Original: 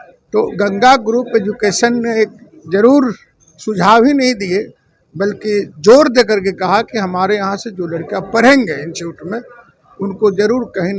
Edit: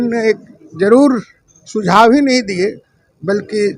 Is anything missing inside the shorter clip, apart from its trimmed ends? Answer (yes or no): no